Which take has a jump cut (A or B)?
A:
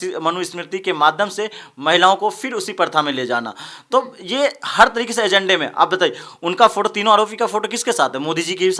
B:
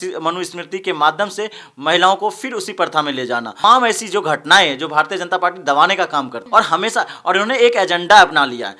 B